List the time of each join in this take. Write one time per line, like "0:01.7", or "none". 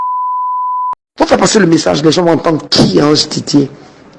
0:01.0